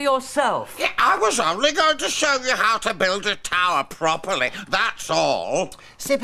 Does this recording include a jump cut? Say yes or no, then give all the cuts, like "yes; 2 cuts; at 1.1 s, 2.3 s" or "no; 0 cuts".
no; 0 cuts